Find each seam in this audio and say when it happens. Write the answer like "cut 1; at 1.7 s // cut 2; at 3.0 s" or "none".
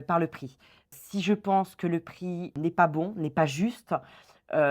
cut 1; at 0.9 s // cut 2; at 2.5 s